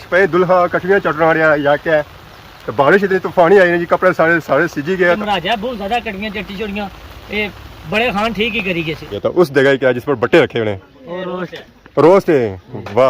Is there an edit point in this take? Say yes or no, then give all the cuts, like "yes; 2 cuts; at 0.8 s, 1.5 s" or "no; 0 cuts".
yes; 2 cuts; at 5.2 s, 9.1 s